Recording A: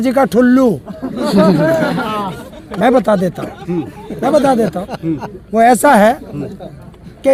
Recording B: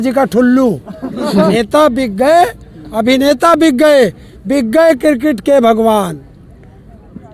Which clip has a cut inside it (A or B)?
B